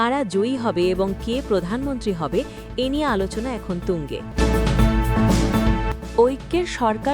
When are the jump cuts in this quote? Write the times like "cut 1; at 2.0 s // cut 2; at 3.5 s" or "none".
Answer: cut 1; at 4.2 s // cut 2; at 6.2 s